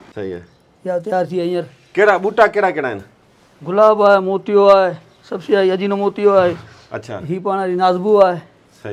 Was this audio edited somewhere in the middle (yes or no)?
no